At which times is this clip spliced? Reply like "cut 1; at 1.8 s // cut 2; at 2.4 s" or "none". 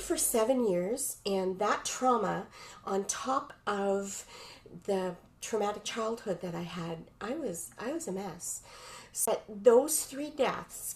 cut 1; at 9.3 s